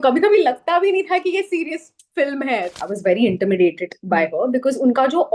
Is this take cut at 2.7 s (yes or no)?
yes